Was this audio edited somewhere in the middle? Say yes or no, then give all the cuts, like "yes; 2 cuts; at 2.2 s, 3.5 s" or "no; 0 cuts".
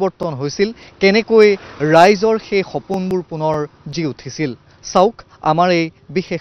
no; 0 cuts